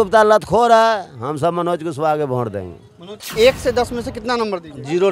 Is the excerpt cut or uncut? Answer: cut